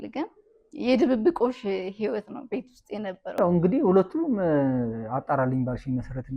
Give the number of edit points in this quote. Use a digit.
1